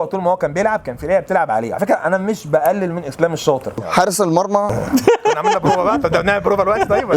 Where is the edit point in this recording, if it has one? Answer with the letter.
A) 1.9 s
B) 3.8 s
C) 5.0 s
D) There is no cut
B